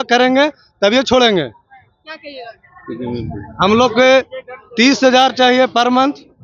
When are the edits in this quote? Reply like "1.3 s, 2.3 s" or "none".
none